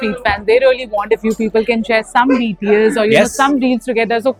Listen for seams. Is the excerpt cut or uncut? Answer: uncut